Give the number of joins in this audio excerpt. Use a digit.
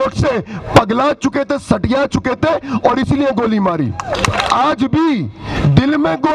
1